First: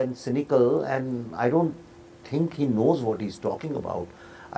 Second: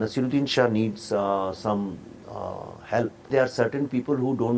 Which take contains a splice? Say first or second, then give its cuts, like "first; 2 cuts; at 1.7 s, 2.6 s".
second; 1 cut; at 3.3 s